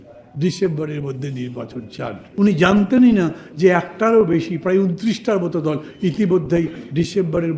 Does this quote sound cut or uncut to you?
cut